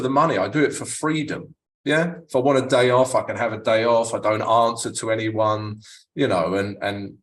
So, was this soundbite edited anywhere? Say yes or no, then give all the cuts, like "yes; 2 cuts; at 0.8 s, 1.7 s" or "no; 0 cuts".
no; 0 cuts